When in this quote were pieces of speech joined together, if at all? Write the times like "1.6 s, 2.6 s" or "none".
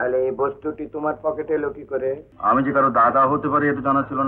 2.3 s